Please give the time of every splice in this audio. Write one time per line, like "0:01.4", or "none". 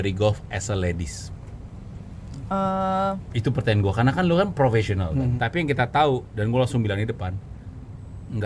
0:05.3